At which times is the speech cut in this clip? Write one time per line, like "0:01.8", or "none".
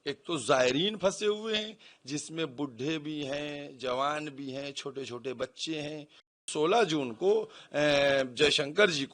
0:06.5